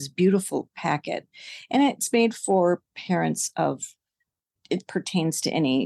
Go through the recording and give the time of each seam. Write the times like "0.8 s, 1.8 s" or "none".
4.6 s